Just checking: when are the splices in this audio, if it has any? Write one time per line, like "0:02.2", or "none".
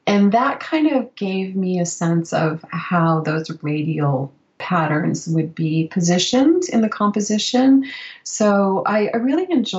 none

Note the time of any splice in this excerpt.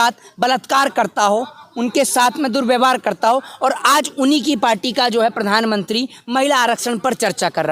none

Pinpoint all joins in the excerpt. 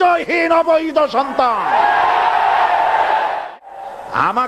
0:03.5

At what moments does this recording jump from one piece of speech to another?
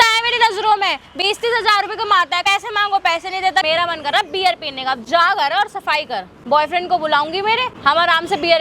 0:02.4
0:03.6
0:06.3
0:07.7

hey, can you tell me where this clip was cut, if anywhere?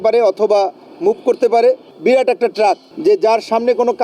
0:01.9
0:02.9

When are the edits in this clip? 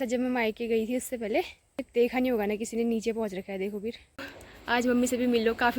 0:01.9
0:04.3

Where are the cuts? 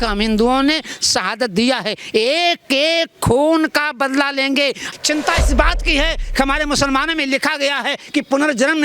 0:04.8

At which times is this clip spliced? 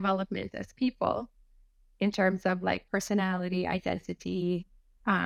none

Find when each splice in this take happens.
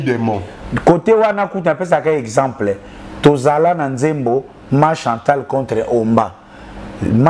none

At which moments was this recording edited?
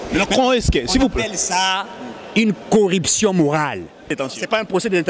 0:04.1

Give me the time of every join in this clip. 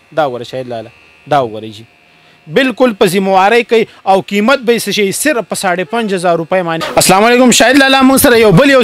0:06.8

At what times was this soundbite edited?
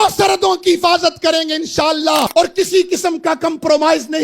0:02.3

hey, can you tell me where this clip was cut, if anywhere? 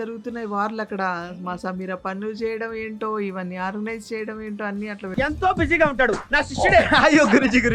none

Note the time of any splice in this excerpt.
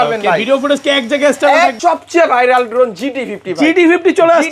0:01.8

